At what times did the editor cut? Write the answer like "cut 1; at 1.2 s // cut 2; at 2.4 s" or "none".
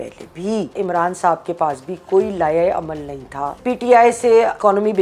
cut 1; at 0.7 s // cut 2; at 3.5 s